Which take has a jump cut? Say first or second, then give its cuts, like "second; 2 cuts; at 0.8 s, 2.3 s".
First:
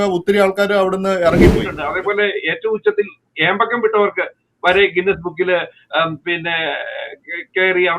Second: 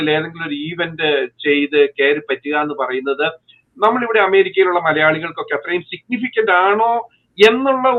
first; 1 cut; at 1.8 s